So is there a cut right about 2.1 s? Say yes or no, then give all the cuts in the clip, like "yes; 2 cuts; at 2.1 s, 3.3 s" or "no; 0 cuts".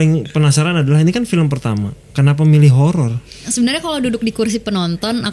no; 1 cut; at 3.5 s